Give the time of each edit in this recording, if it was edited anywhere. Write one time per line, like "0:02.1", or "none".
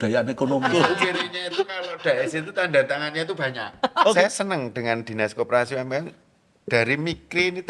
0:00.8
0:04.1